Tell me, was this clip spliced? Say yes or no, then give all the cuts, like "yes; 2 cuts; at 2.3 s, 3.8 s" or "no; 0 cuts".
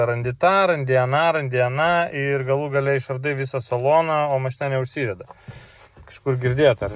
no; 0 cuts